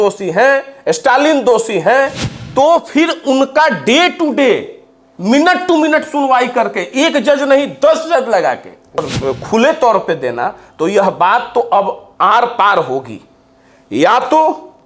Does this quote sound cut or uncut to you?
cut